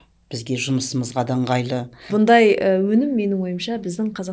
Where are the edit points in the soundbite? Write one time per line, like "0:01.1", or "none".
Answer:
0:02.0